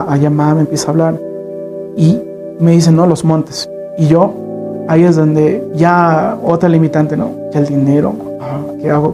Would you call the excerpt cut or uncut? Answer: uncut